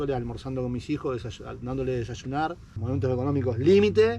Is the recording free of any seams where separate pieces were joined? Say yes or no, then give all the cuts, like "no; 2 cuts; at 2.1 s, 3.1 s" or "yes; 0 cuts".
no; 1 cut; at 2.7 s